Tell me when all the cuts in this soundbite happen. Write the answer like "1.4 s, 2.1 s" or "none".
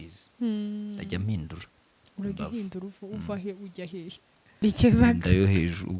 4.6 s